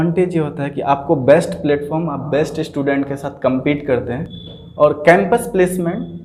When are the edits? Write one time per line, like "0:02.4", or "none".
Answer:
none